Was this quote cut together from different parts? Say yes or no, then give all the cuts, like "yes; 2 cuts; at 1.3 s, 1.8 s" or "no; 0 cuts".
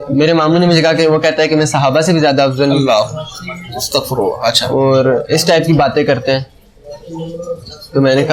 no; 0 cuts